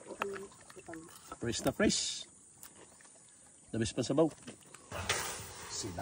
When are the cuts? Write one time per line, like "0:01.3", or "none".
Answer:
0:04.9